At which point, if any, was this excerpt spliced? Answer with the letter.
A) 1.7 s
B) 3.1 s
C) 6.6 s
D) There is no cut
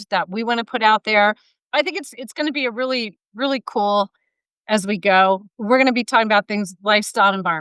A